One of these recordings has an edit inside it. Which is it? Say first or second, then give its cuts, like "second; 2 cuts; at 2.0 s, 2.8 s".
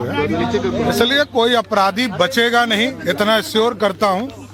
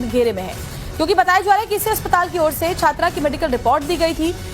second; 1 cut; at 2.3 s